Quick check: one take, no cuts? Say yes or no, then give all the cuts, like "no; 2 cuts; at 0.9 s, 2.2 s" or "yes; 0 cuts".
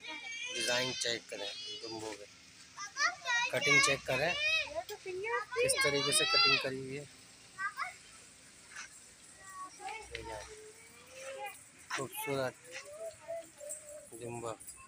yes; 0 cuts